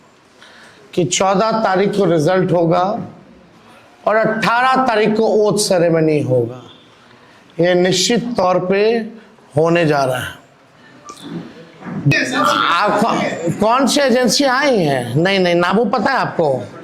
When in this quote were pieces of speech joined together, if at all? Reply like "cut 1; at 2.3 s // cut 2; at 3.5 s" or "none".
cut 1; at 12.1 s

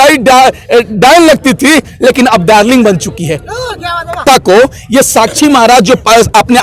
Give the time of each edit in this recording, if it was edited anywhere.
cut 1; at 4.2 s

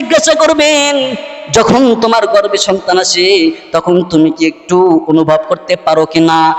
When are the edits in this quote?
none

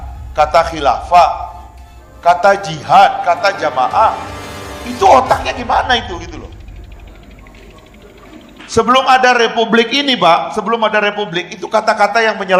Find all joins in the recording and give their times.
none

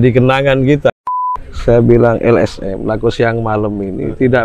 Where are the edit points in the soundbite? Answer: cut 1; at 1.1 s

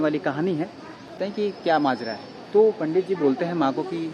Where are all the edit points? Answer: cut 1; at 1.2 s

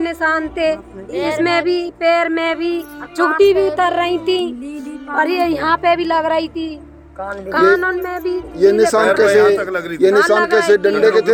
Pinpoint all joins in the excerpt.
none

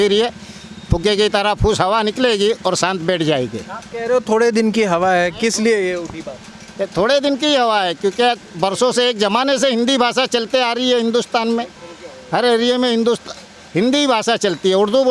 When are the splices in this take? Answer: none

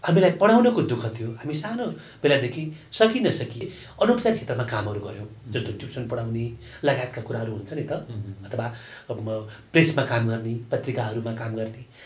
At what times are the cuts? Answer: cut 1; at 3.7 s

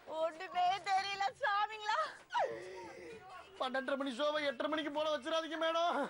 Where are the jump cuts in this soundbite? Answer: cut 1; at 2.2 s

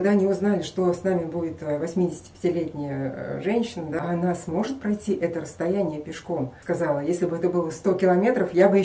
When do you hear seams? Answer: cut 1; at 4.0 s // cut 2; at 6.6 s

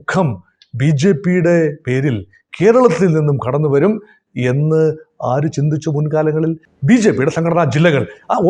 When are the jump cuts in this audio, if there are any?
cut 1; at 6.7 s

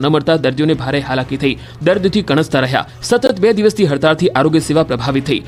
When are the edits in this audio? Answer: none

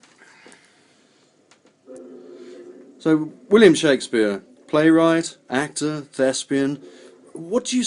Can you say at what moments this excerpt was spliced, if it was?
cut 1; at 3.7 s

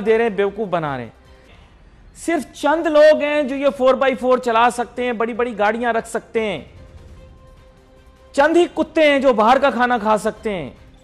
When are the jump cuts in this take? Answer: none

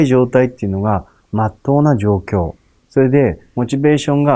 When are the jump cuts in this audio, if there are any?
none

